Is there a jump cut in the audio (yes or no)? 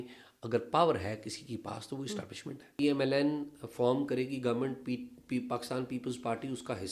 yes